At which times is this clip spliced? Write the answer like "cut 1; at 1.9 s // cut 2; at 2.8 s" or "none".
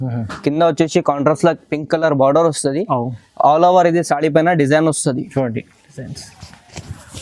none